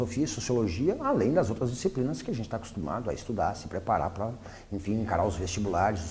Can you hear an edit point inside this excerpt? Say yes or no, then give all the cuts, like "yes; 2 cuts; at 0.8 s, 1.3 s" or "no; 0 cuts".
yes; 1 cut; at 4.6 s